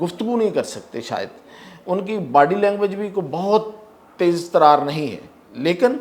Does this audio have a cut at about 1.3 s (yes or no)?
no